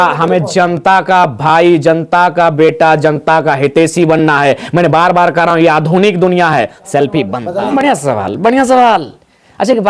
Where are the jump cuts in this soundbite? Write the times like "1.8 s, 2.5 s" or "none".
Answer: 7.4 s